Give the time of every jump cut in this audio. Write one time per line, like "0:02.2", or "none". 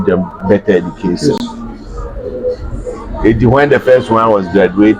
none